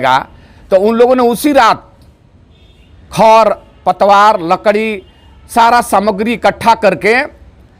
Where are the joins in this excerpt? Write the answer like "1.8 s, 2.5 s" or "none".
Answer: none

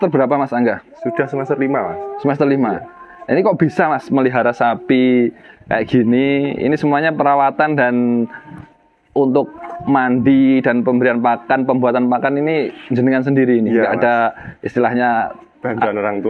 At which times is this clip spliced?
none

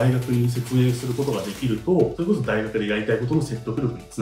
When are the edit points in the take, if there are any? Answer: 2.1 s

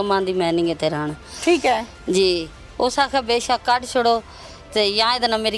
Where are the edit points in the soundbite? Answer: none

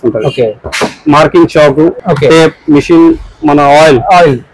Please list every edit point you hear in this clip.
2.0 s

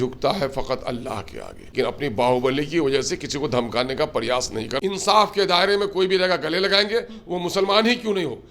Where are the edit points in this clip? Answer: 1.7 s, 4.8 s

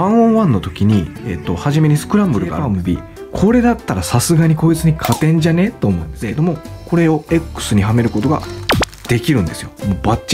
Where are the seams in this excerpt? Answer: 2.6 s, 6.2 s

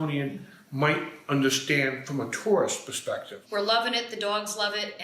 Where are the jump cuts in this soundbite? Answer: 3.3 s

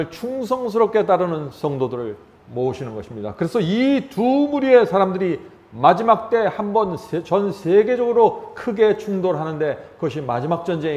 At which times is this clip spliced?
none

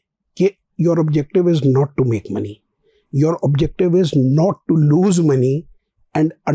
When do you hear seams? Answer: none

